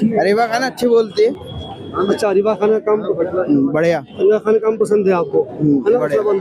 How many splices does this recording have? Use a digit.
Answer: 0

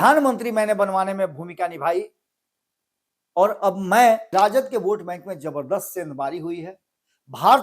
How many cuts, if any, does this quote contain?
1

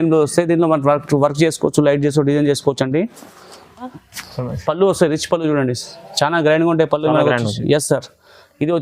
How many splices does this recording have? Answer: 1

